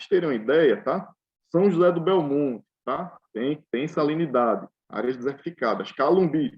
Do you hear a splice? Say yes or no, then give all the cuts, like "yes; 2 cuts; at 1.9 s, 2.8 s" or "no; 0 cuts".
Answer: yes; 2 cuts; at 1.4 s, 4.8 s